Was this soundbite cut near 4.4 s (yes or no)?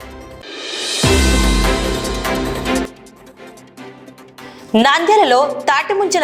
yes